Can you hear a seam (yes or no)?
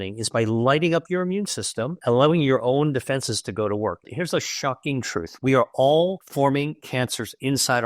yes